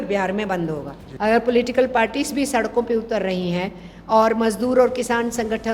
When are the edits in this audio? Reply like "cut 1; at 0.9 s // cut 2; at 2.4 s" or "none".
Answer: cut 1; at 1.0 s